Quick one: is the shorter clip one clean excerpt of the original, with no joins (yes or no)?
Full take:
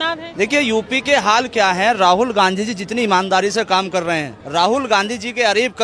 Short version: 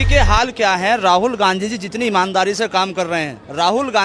yes